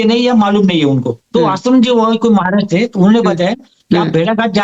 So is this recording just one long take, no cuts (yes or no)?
no